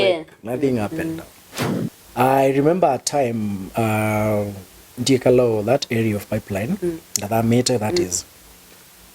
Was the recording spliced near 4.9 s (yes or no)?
no